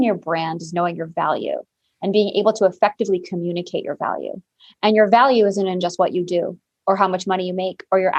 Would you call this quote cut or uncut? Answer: uncut